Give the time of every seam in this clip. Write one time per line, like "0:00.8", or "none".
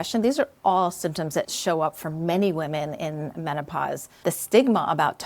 0:01.5
0:04.2